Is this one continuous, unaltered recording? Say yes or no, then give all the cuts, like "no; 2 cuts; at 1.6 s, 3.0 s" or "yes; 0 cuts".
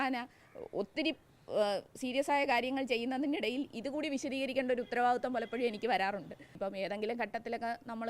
no; 1 cut; at 6.4 s